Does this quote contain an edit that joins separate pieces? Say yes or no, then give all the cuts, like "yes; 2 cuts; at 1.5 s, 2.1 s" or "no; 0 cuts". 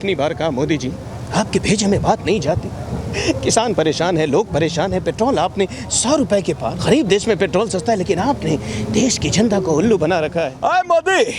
yes; 2 cuts; at 6.8 s, 10.5 s